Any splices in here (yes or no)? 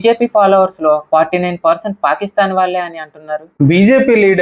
yes